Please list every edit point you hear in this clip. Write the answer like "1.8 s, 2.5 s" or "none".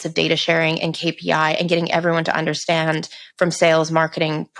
none